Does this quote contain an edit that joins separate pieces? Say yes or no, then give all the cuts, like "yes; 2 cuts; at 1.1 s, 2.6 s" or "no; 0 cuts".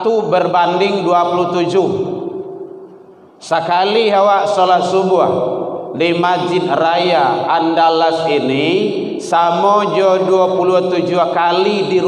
no; 0 cuts